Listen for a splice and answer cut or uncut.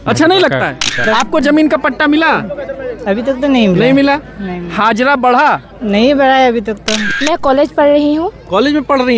cut